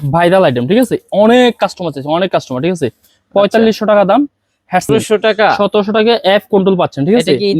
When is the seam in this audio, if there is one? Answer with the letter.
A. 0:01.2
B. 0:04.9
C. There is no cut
B